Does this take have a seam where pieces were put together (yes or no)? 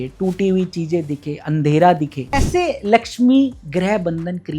yes